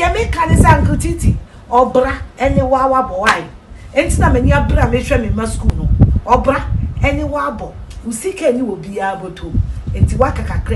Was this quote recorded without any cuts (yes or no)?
yes